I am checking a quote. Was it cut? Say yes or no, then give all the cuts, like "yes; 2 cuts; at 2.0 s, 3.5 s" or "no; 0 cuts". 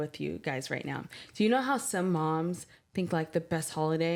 no; 0 cuts